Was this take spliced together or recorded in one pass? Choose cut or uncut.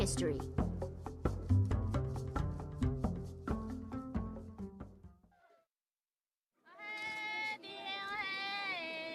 uncut